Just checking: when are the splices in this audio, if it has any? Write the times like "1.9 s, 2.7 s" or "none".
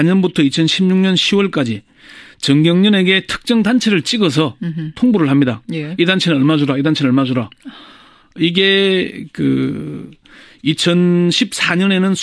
9.3 s